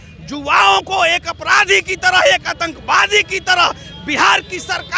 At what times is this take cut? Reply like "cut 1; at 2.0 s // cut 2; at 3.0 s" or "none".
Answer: none